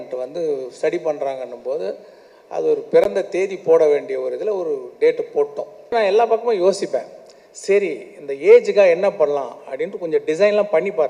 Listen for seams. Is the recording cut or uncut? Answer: cut